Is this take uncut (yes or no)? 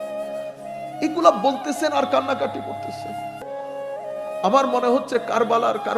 yes